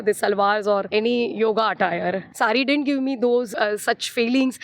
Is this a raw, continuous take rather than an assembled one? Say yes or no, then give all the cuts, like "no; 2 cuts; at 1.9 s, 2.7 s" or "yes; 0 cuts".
no; 3 cuts; at 0.9 s, 2.3 s, 3.5 s